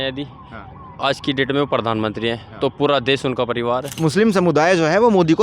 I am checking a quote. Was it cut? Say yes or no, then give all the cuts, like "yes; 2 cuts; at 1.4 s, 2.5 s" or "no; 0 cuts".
yes; 1 cut; at 3.9 s